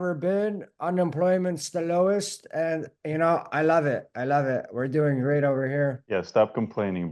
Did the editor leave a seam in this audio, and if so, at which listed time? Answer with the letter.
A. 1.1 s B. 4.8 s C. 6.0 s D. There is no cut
C